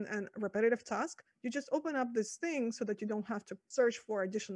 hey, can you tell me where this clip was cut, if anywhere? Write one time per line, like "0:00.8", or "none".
0:03.6